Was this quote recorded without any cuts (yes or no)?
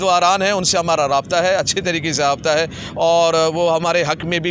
yes